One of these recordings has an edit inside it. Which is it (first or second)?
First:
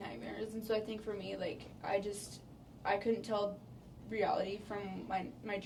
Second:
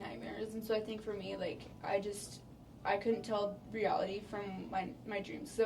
second